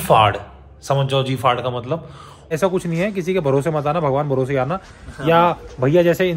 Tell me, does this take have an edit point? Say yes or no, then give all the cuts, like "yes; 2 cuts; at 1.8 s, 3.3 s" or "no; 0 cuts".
yes; 1 cut; at 2.5 s